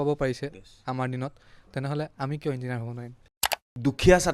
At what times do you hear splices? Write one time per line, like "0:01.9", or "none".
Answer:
0:03.3

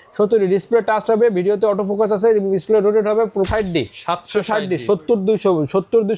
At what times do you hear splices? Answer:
0:03.5

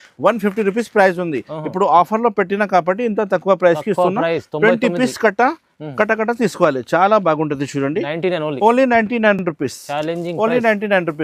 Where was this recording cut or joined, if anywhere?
none

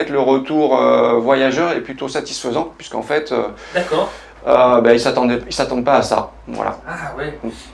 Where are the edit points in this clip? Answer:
none

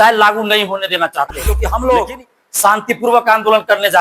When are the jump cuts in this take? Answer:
0:01.6

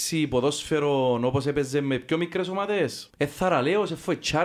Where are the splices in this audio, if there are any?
0:03.0

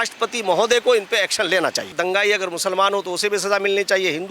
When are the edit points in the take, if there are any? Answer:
0:01.9

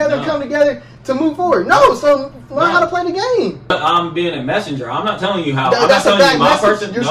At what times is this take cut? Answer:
0:03.7

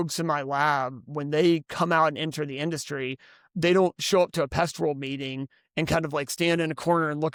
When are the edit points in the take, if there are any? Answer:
none

